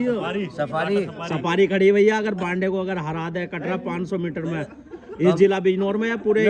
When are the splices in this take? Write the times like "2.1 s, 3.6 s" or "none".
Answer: none